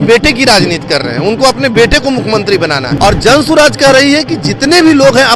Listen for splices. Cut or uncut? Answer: cut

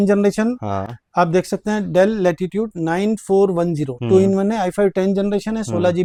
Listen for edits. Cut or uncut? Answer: uncut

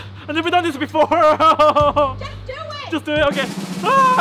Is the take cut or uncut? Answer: uncut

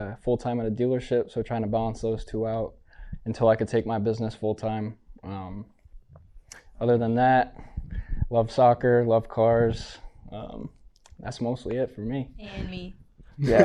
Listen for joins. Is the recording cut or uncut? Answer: uncut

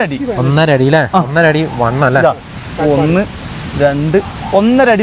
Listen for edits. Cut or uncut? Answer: uncut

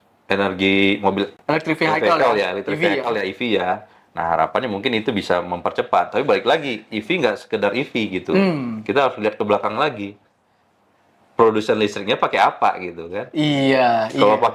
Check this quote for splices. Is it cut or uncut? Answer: uncut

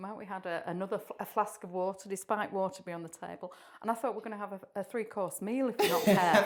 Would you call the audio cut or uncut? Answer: uncut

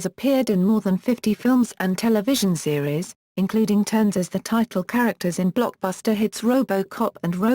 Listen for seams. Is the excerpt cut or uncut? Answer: cut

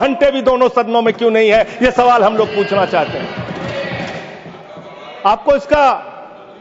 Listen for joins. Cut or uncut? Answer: uncut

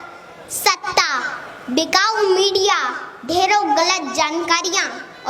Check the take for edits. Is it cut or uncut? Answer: uncut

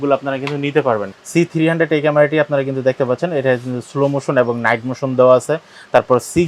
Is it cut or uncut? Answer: cut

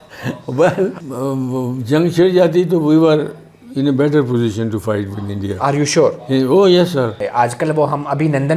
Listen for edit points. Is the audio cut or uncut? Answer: cut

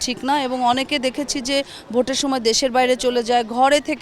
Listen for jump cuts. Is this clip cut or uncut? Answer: uncut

